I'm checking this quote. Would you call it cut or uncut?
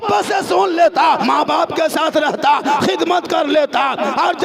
cut